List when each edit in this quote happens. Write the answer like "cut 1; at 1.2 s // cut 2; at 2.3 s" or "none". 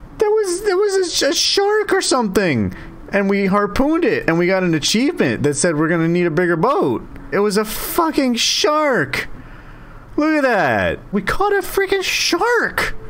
cut 1; at 7.3 s // cut 2; at 11.1 s